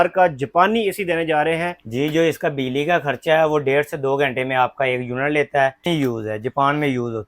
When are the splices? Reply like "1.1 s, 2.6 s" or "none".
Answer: 1.8 s, 5.8 s